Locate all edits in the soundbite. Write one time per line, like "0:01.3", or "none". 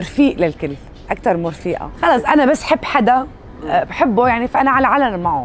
0:01.9

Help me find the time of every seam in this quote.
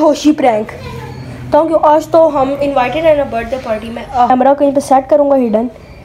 0:04.3

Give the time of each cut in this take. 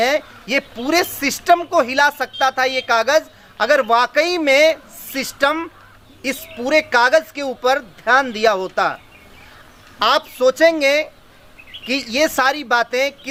none

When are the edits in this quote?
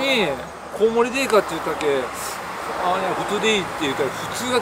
none

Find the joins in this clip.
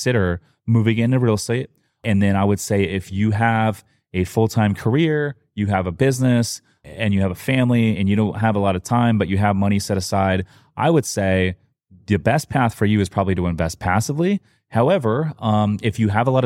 0:02.0

